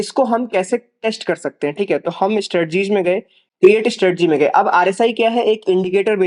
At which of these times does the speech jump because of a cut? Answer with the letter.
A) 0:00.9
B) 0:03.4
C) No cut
C